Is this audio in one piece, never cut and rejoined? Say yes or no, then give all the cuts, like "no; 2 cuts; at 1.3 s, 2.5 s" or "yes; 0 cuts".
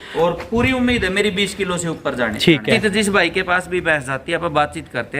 no; 1 cut; at 2.8 s